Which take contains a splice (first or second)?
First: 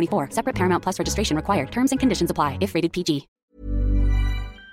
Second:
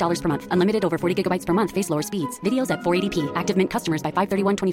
first